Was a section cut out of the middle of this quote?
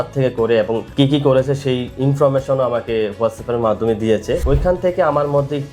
yes; 2 cuts; at 0.9 s, 4.4 s

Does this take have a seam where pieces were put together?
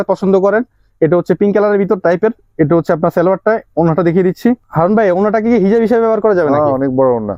no; 0 cuts

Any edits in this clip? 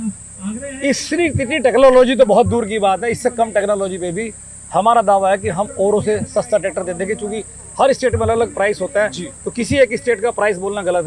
no; 0 cuts

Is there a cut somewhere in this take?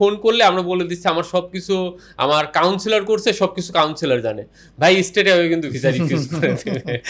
no; 0 cuts

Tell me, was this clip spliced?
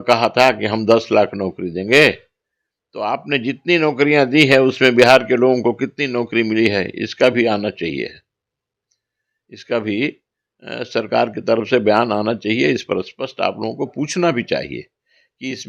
no; 0 cuts

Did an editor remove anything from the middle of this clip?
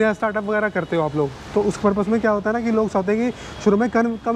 no; 0 cuts

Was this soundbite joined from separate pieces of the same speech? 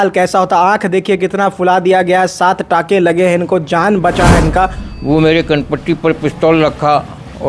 yes; 1 cut; at 4.9 s

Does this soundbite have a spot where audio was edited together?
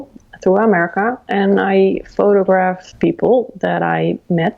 yes; 1 cut; at 2.9 s

